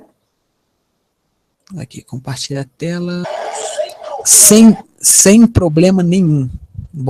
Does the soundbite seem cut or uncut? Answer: uncut